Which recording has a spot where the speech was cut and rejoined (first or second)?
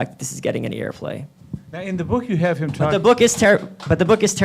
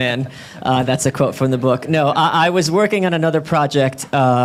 first